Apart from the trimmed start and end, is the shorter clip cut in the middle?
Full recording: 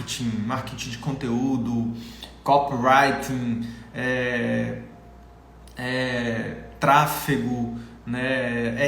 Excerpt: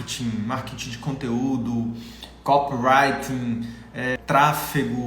yes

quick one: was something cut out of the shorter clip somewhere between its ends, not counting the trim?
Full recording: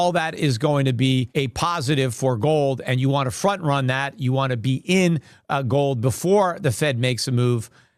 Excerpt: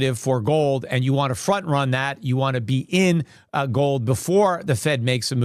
no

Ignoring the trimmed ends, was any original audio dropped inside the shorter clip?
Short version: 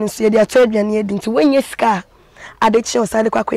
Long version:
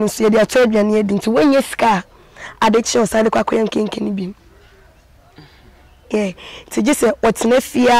no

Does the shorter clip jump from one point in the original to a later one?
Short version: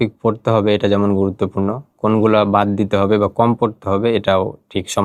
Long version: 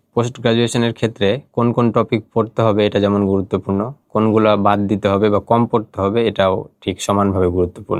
no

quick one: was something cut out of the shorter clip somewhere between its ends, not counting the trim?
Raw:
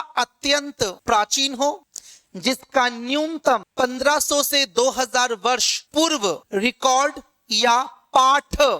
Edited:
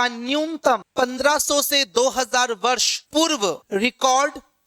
no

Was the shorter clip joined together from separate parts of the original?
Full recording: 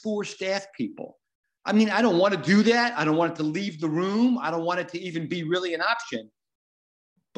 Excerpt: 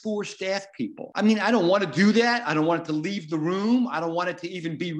yes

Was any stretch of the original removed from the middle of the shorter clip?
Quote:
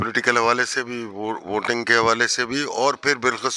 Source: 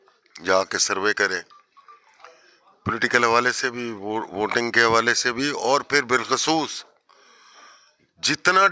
no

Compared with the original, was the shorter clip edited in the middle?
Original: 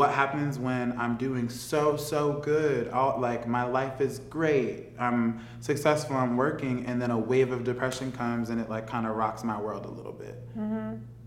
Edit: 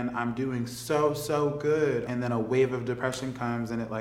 yes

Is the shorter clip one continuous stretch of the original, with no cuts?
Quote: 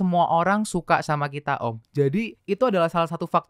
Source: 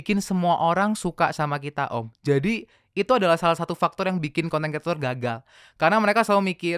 no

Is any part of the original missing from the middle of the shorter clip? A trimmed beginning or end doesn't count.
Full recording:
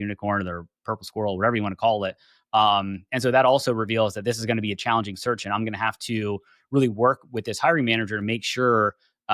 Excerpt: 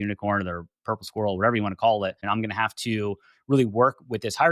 yes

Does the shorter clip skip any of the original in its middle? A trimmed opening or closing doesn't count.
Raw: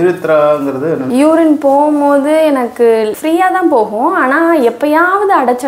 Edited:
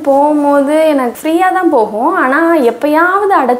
yes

